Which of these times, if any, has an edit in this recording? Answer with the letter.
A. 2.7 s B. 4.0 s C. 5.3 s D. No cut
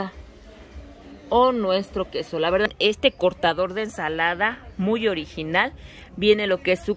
A